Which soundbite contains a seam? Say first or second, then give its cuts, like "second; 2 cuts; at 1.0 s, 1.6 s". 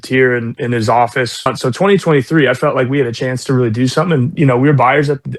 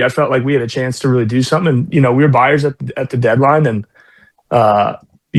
first; 1 cut; at 1.5 s